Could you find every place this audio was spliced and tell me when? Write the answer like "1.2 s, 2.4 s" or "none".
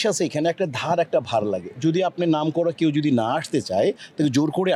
none